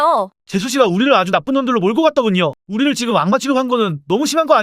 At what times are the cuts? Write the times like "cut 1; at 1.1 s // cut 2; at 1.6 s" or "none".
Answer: cut 1; at 2.6 s